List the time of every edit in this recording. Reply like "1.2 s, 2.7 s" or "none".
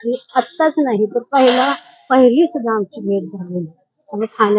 none